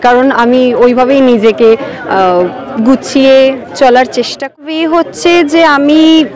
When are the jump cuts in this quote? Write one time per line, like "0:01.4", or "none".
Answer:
0:04.6